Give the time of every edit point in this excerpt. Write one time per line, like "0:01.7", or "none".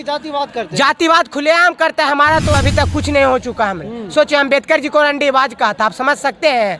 0:02.5